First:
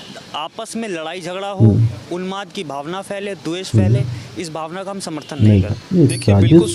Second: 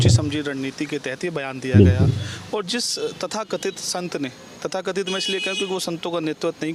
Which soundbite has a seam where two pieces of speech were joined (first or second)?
first